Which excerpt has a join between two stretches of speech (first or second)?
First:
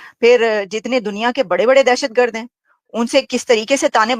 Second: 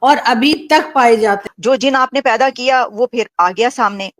second